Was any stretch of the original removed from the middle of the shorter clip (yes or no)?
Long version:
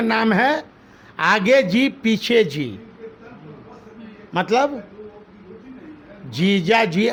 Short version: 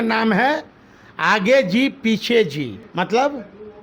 yes